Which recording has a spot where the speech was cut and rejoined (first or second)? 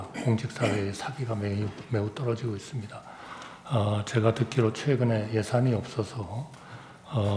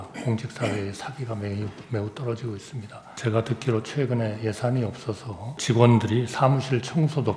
second